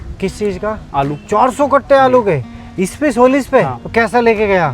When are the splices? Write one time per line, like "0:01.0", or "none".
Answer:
0:01.2
0:03.8

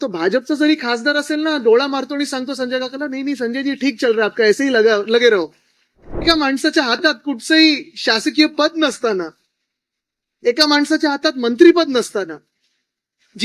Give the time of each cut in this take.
0:06.2

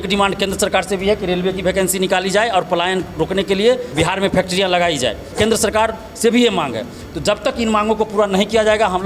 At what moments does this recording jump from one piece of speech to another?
0:03.9
0:05.2

